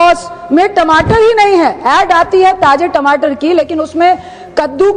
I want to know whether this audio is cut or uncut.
uncut